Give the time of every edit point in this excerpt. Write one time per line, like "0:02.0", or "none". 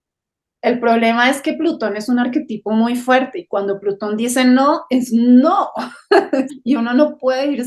0:06.5